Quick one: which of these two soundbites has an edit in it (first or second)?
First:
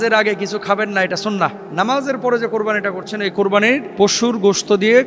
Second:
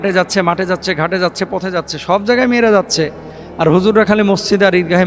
first